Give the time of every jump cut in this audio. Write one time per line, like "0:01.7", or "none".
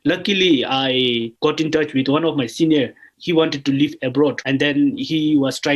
0:01.3
0:03.0
0:04.4